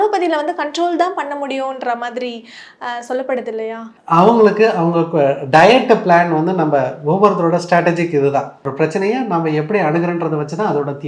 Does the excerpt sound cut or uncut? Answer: uncut